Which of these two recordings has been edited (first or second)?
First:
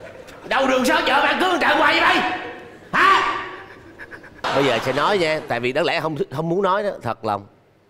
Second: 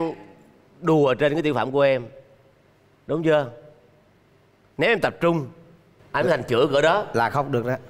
first